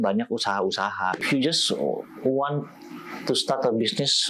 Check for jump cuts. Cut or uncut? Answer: cut